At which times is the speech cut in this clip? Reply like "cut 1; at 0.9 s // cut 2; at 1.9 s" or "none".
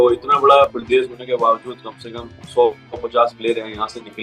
none